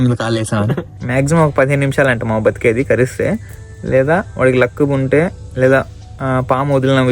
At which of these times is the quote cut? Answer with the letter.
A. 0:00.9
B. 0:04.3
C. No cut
A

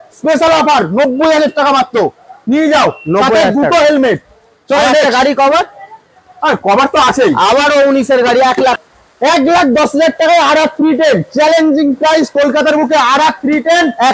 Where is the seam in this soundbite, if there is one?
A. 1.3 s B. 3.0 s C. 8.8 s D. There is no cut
C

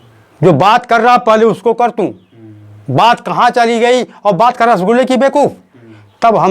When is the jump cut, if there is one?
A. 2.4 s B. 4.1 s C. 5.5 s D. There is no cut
D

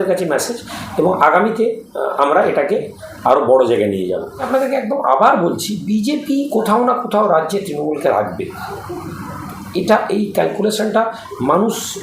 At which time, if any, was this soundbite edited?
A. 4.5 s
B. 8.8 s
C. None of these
A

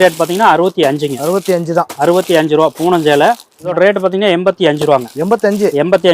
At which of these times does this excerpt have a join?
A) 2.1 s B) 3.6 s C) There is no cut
B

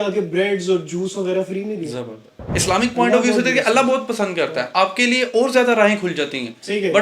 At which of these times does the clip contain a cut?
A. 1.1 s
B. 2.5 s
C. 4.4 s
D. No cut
B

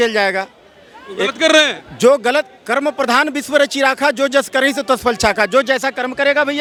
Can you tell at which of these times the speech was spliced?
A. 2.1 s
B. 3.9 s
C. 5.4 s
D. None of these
D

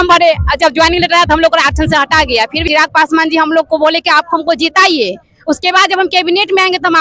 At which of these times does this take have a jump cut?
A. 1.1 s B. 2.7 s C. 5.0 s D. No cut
B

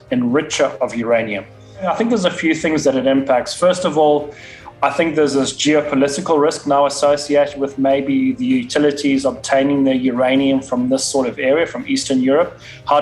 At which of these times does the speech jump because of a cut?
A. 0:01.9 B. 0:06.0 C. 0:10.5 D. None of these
A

